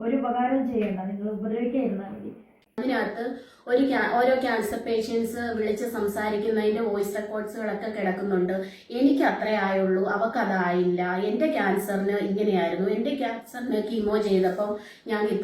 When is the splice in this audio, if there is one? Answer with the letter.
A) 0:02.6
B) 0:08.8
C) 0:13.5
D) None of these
A